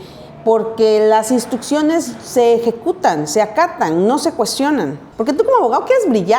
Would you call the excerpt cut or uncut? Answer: cut